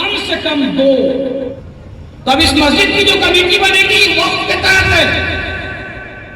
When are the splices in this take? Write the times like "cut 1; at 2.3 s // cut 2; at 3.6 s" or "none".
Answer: cut 1; at 1.5 s